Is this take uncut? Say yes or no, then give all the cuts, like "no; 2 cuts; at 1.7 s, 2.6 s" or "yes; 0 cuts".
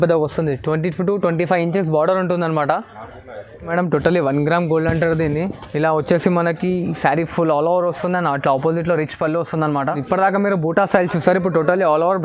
no; 2 cuts; at 3.7 s, 9.9 s